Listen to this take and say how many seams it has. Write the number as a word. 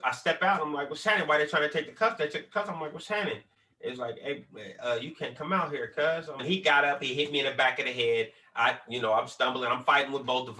one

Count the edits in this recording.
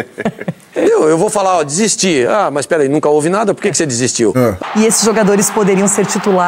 one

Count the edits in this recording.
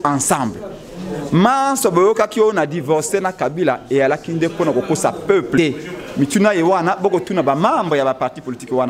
one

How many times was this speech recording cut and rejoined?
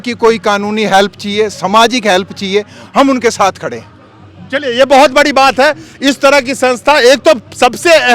zero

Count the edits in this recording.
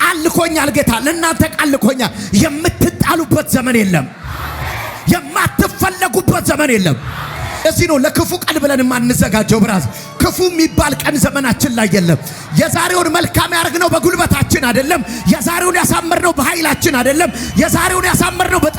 one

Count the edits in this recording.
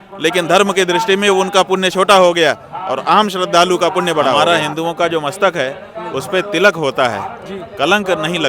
one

